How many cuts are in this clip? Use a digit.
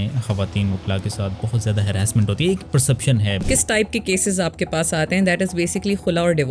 1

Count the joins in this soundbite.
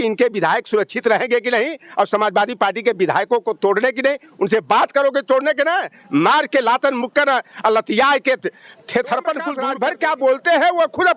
1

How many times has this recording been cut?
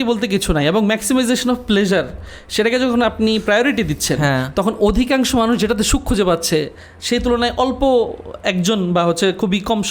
0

